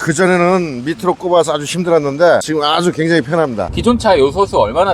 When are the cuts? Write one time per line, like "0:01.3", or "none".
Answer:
0:03.7

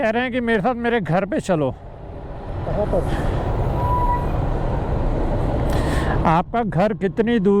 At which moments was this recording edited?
none

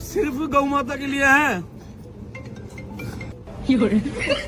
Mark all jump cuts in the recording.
none

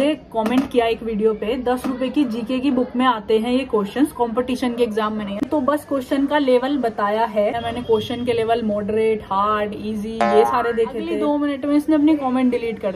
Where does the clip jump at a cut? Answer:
0:05.5
0:07.6
0:11.1

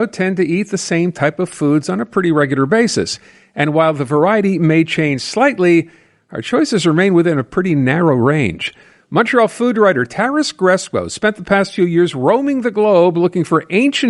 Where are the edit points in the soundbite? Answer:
none

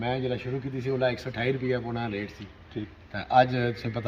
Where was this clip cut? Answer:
none

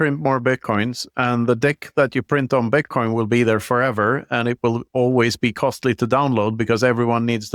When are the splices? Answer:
none

